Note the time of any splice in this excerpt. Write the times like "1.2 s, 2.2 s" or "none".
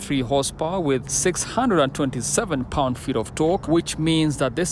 1.1 s, 3.6 s